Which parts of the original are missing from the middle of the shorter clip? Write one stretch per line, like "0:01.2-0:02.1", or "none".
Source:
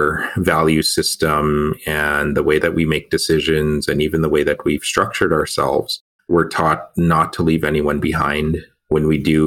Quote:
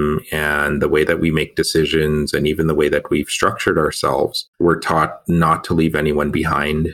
0:06.0-0:06.1